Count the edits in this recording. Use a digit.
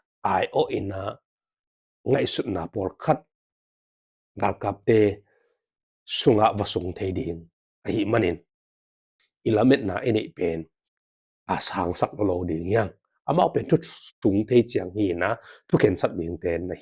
1